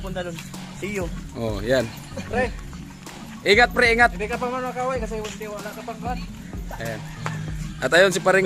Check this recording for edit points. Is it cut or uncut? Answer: uncut